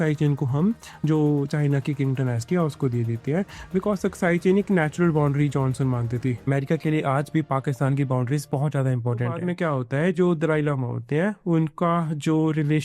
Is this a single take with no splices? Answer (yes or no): no